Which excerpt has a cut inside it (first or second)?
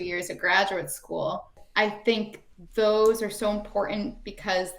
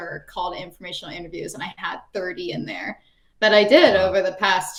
first